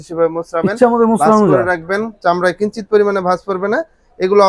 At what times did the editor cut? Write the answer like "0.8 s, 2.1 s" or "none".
none